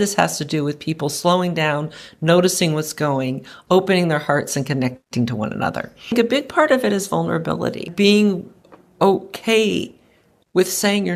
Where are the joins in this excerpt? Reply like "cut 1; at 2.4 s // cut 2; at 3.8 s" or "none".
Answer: cut 1; at 6.1 s // cut 2; at 7.9 s

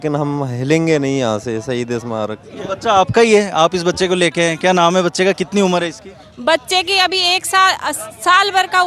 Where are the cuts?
cut 1; at 2.4 s

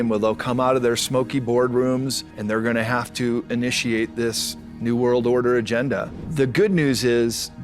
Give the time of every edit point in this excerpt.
cut 1; at 2.3 s // cut 2; at 6.2 s

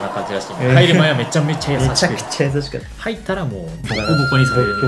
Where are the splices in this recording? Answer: cut 1; at 3.8 s

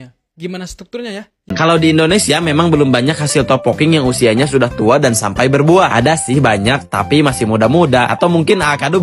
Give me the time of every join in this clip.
cut 1; at 1.5 s

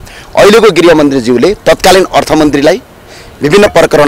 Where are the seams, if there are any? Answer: none

